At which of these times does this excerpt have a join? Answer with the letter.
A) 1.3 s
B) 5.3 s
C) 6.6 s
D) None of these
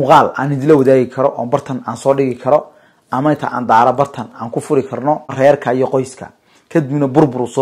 B